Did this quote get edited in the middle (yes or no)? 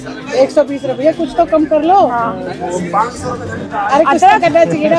no